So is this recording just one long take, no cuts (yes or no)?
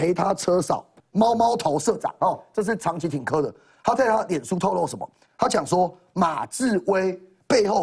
no